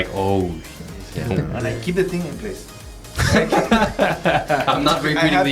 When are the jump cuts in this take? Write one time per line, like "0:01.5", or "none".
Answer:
0:01.5